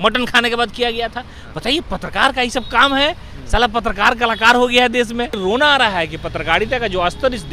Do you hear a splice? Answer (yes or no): yes